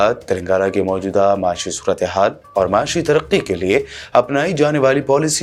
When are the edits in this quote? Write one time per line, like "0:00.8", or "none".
none

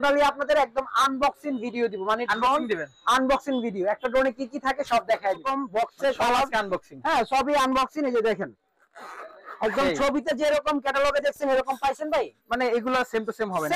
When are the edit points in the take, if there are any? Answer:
0:05.4

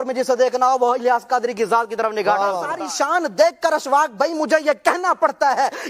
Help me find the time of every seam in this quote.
0:02.7

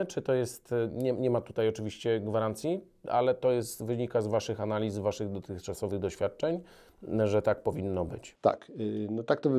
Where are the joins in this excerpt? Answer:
none

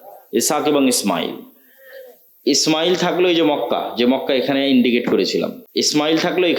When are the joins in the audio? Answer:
0:05.6

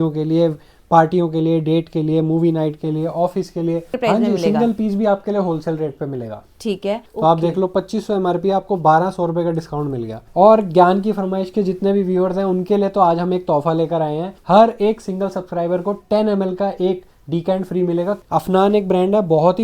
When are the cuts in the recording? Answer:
0:03.9
0:07.1
0:10.2
0:14.3
0:18.2

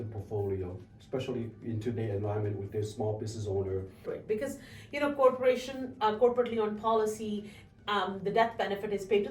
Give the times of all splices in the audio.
0:04.0

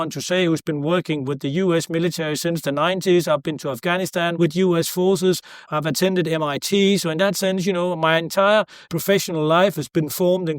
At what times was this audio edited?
0:04.3
0:05.6
0:08.9

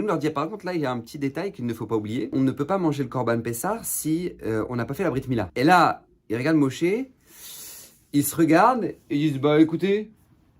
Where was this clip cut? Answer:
0:02.3
0:05.5

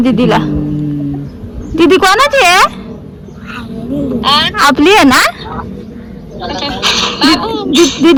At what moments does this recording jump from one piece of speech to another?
none

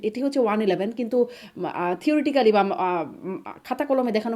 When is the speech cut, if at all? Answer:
none

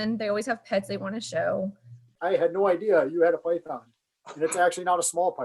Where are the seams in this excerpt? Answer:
0:02.1

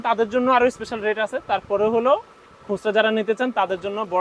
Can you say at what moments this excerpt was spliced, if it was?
none

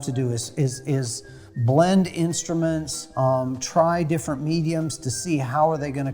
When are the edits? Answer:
none

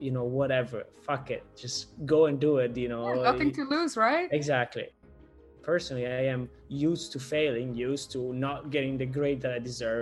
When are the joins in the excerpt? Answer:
0:04.9

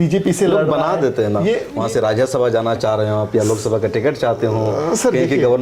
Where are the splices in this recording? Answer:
0:01.7

